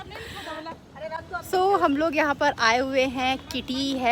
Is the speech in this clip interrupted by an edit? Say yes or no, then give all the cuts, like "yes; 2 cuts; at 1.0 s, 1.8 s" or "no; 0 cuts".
no; 0 cuts